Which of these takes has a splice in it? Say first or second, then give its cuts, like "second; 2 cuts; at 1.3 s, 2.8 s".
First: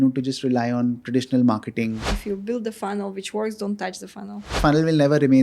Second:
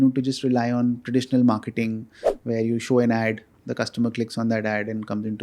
first; 2 cuts; at 2.1 s, 4.6 s